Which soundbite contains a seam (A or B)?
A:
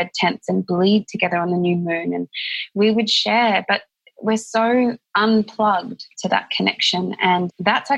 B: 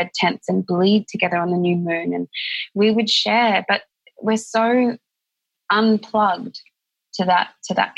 A